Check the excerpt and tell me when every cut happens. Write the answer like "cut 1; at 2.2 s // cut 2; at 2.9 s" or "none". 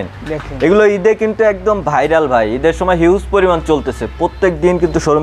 none